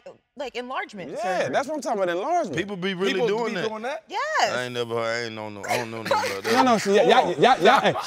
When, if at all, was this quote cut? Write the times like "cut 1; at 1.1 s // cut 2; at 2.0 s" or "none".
none